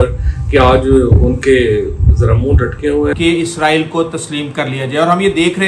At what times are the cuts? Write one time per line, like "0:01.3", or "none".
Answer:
0:03.1